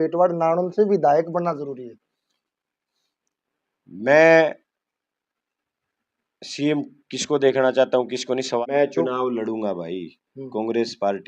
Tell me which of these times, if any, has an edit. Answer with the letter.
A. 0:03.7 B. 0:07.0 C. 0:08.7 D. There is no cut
C